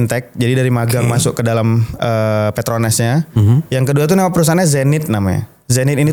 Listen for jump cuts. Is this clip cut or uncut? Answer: uncut